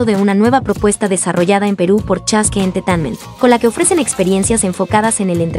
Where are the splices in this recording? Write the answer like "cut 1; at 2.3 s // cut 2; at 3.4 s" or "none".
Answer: none